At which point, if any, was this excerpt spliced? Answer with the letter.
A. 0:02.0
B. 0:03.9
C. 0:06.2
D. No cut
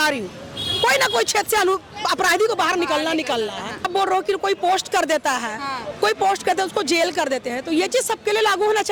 B